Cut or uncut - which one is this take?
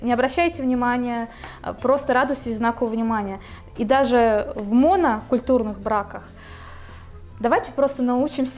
uncut